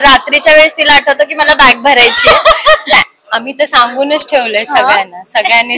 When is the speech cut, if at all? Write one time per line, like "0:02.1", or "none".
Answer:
0:02.9